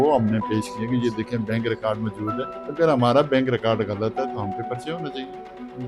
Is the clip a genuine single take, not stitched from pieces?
no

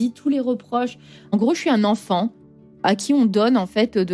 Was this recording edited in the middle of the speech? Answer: yes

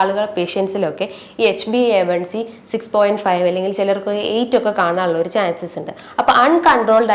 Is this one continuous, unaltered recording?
yes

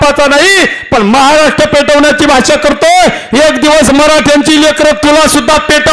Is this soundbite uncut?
yes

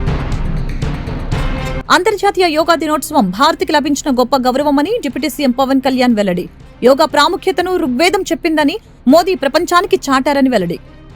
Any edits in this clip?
no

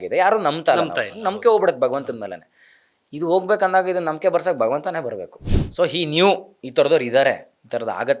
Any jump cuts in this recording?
yes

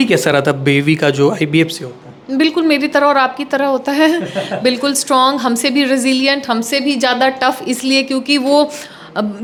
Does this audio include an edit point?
no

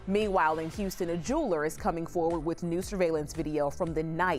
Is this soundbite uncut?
yes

